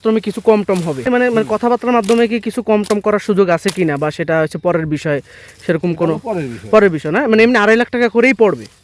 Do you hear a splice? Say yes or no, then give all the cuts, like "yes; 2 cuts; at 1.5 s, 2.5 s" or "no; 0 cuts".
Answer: yes; 1 cut; at 1.1 s